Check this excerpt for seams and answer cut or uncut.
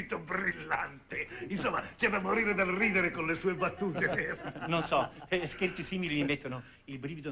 cut